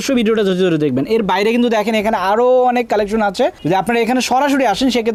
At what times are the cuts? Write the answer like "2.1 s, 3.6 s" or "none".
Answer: none